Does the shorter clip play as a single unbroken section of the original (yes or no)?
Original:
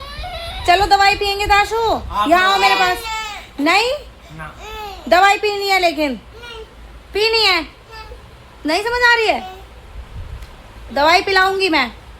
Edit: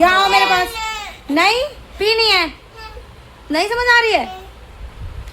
no